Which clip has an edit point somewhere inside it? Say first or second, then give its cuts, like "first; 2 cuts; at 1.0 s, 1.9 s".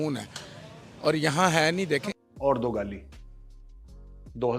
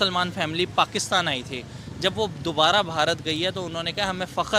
first; 1 cut; at 2.2 s